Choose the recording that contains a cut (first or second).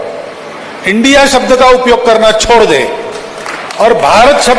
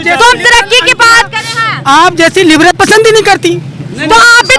second